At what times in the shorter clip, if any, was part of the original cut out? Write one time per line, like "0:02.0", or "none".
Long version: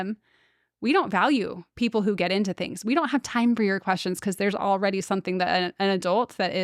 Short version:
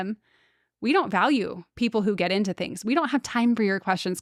none